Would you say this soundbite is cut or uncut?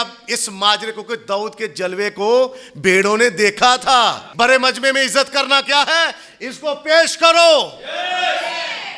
cut